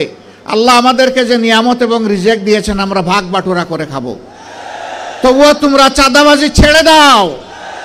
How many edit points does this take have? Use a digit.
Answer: 0